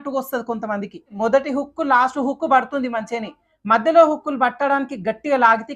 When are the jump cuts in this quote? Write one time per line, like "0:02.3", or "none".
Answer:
0:01.1